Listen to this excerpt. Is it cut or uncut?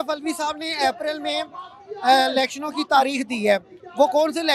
uncut